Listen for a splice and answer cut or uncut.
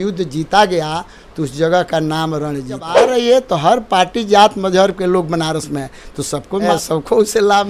cut